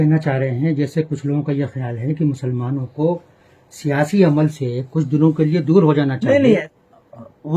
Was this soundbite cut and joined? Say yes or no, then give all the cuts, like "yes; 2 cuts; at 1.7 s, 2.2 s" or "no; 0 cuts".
yes; 1 cut; at 6.7 s